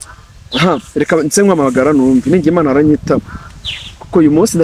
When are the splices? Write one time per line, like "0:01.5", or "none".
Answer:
none